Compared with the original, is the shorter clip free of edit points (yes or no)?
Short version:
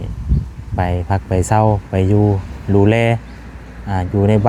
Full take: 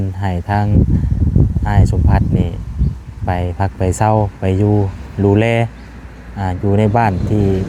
yes